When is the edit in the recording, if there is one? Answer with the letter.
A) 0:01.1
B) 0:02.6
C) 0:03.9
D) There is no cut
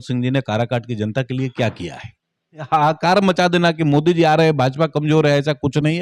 B